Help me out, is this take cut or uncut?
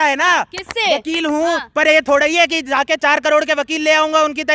uncut